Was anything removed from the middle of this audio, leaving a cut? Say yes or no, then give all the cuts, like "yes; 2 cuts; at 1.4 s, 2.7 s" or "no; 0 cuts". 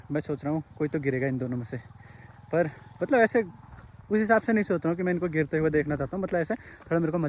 no; 0 cuts